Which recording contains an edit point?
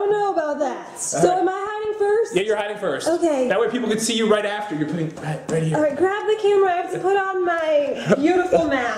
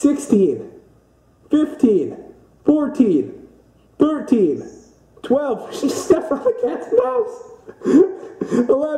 first; 1 cut; at 7.9 s

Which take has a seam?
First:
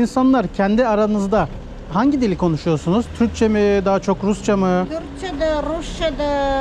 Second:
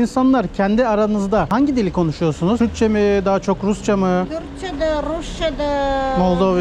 second; 2 cuts; at 1.5 s, 2.6 s

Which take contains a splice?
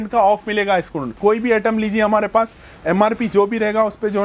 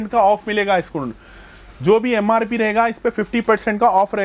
first; 1 cut; at 1.2 s

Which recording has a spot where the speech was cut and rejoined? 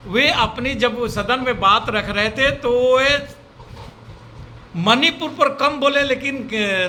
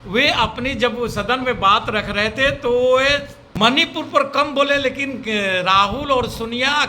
second; 1 cut; at 3.4 s

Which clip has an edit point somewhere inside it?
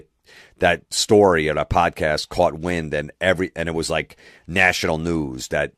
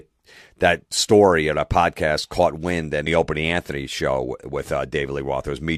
first; 1 cut; at 3.0 s

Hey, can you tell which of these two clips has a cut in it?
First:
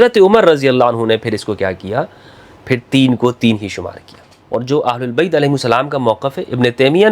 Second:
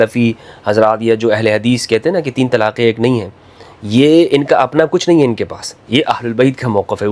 first; 1 cut; at 4.3 s

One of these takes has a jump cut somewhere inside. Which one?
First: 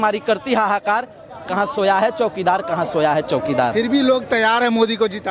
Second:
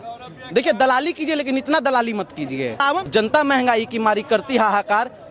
second; 1 cut; at 3.0 s

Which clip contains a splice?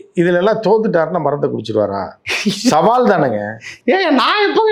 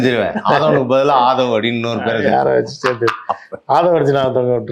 first; 1 cut; at 2.2 s

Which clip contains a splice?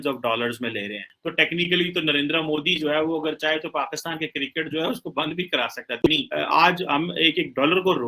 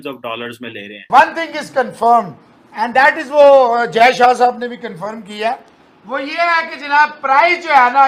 first; 2 cuts; at 1.0 s, 6.0 s

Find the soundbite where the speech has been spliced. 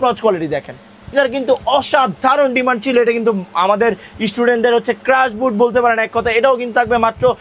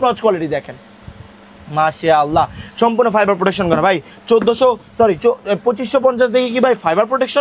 first; 1 cut; at 1.1 s

